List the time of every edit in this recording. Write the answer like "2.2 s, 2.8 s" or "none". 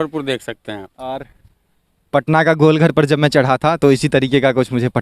none